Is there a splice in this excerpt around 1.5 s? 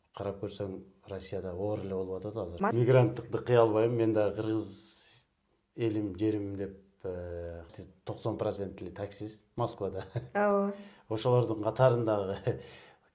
no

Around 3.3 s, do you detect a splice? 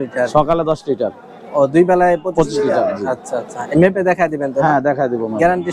no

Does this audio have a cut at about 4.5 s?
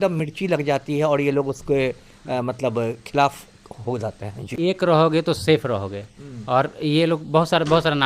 yes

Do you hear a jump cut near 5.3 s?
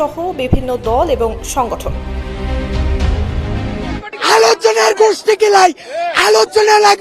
no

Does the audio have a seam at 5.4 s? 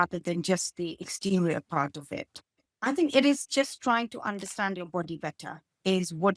no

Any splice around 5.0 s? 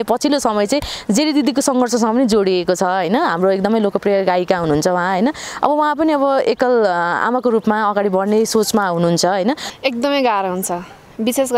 no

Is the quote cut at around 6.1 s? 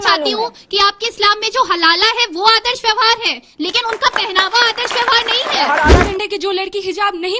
yes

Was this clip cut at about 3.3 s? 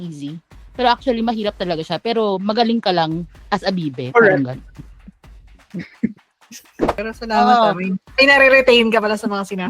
no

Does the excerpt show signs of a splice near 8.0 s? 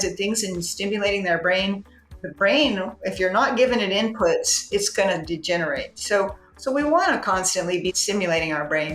yes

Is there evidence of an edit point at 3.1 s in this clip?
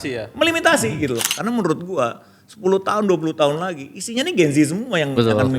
no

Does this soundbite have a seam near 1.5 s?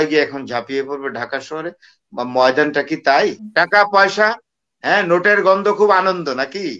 no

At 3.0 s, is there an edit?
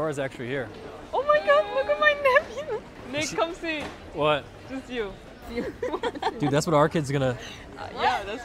yes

